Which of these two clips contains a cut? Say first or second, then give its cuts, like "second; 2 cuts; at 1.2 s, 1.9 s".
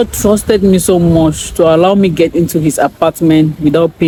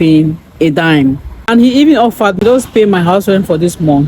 second; 2 cuts; at 1.3 s, 2.4 s